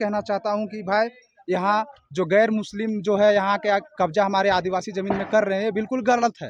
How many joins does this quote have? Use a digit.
0